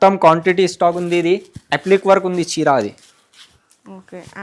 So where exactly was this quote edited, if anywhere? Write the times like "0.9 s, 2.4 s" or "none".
none